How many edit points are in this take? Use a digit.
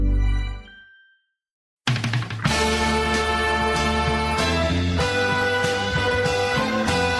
1